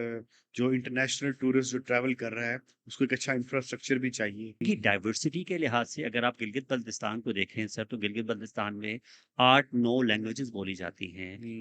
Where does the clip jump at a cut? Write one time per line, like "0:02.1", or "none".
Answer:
0:04.6